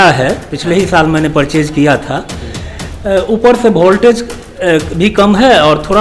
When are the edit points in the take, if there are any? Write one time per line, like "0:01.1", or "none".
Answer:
none